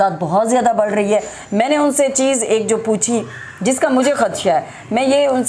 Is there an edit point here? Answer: no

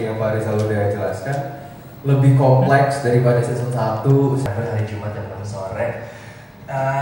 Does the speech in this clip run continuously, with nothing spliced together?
no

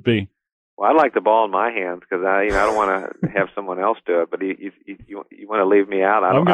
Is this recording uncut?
yes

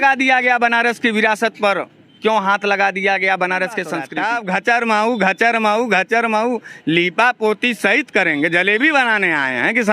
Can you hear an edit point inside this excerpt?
yes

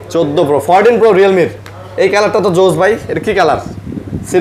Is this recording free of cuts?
yes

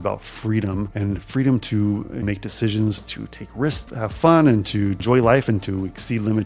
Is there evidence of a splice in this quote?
yes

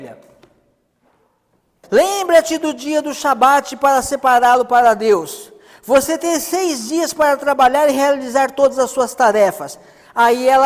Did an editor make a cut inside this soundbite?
yes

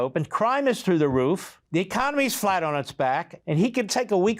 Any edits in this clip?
yes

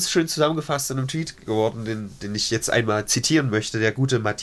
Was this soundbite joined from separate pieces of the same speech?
no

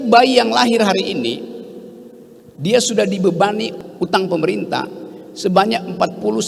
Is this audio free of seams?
no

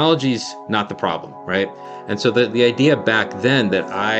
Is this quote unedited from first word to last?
no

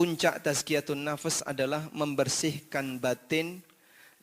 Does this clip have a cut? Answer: no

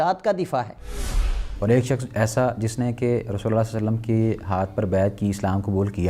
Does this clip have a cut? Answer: yes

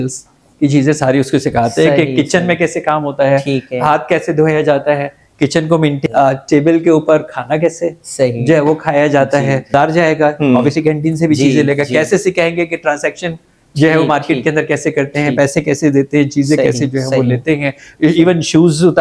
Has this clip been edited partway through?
yes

